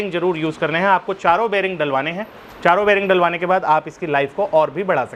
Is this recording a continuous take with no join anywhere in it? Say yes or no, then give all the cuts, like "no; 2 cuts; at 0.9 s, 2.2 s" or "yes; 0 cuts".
yes; 0 cuts